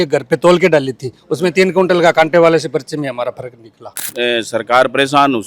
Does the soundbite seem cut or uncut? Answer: cut